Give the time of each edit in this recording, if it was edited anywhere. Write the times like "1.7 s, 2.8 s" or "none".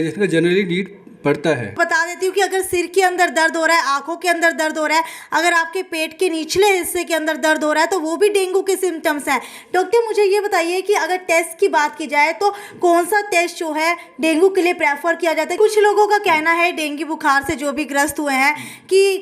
1.8 s, 15.6 s